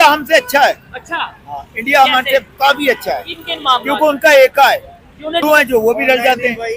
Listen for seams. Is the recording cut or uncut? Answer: cut